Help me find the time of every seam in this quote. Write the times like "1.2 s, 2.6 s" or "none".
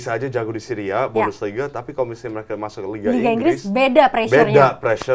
none